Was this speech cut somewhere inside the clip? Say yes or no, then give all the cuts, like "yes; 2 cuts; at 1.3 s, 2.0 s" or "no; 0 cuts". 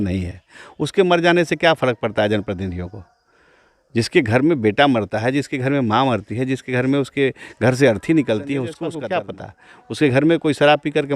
yes; 1 cut; at 8.8 s